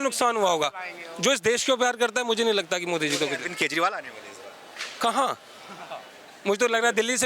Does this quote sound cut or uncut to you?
uncut